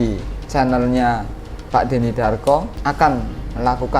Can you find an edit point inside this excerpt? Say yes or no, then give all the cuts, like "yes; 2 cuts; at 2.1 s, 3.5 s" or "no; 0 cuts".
yes; 1 cut; at 2.7 s